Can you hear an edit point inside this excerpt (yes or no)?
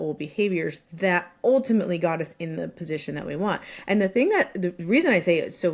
no